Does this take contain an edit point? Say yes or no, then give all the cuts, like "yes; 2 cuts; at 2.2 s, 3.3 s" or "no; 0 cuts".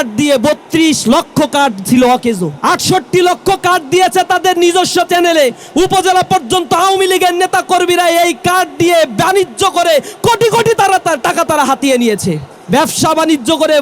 yes; 2 cuts; at 2.5 s, 12.5 s